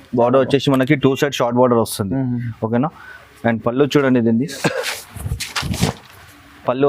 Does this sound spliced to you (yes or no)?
no